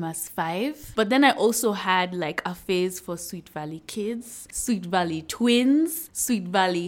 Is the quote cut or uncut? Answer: cut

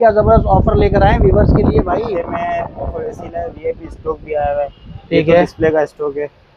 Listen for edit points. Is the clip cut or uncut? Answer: uncut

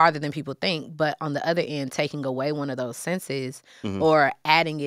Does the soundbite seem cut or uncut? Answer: uncut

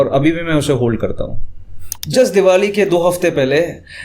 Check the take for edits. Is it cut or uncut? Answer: cut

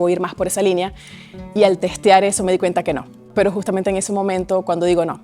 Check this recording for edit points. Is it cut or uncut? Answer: cut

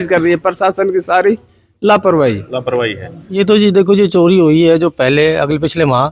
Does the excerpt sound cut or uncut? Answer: cut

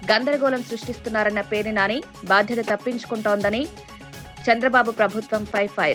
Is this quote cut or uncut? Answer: uncut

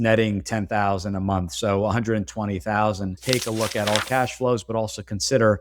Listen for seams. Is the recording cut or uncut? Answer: cut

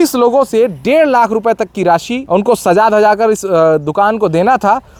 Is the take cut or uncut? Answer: uncut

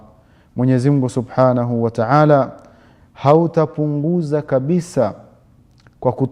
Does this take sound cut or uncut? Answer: uncut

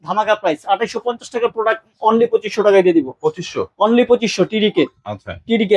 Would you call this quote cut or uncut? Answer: uncut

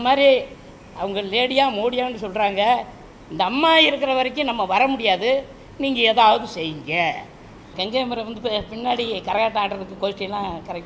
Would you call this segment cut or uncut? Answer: cut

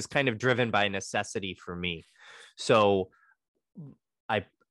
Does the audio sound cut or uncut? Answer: cut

